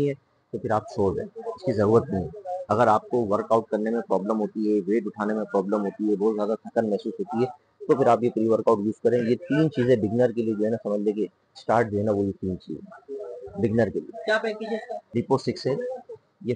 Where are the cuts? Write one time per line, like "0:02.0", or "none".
0:15.0